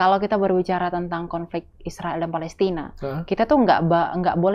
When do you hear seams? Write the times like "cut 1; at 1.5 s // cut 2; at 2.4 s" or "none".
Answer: none

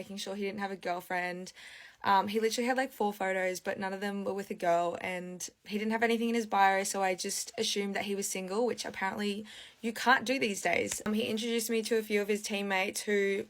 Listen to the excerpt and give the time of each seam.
cut 1; at 11.1 s

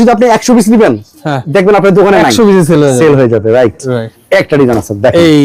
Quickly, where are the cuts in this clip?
none

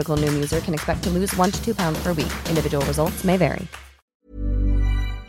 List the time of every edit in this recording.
cut 1; at 4.1 s

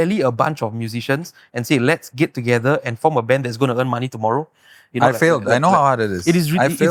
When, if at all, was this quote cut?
none

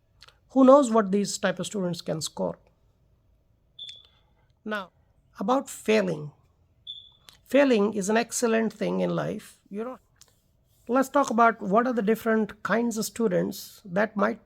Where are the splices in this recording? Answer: cut 1; at 4.8 s // cut 2; at 9.9 s

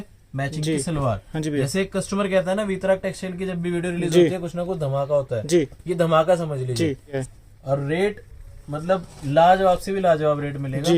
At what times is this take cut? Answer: cut 1; at 7.2 s

